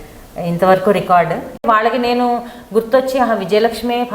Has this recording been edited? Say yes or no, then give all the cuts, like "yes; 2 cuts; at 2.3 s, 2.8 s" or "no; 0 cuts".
yes; 1 cut; at 1.6 s